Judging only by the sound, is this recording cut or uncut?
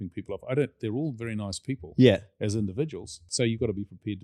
cut